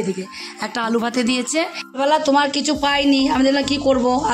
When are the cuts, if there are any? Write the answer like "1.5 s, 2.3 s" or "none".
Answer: 1.8 s